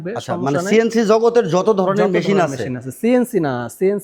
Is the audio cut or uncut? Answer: uncut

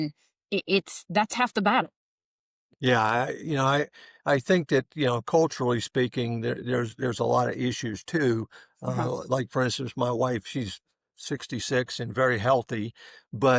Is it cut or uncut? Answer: uncut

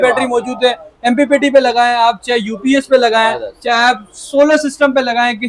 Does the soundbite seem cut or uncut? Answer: uncut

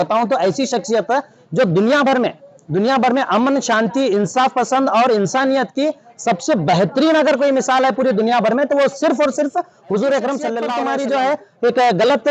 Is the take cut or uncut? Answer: cut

